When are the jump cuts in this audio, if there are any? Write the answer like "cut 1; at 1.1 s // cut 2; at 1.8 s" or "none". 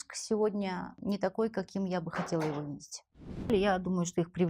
cut 1; at 0.9 s // cut 2; at 3.5 s